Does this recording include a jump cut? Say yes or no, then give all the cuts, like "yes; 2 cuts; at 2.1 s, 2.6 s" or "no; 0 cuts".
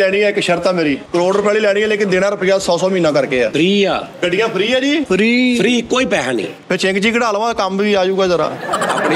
yes; 4 cuts; at 1.0 s, 3.5 s, 4.1 s, 5.0 s